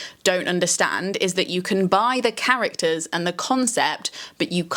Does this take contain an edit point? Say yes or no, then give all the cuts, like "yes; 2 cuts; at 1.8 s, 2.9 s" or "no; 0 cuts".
no; 0 cuts